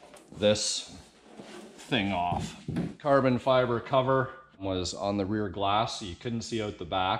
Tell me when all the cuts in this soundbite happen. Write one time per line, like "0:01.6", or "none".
0:03.0
0:04.6